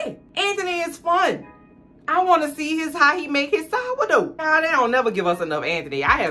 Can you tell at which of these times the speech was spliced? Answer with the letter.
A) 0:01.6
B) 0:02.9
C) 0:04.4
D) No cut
C